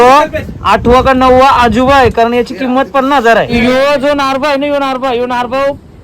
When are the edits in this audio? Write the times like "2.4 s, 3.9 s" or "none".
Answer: 3.5 s